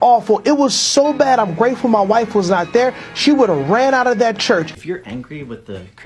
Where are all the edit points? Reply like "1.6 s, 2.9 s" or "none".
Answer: 4.8 s